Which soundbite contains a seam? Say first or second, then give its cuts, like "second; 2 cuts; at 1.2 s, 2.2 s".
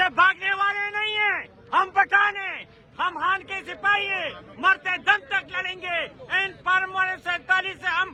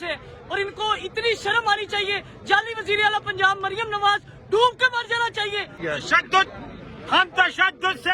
second; 1 cut; at 5.8 s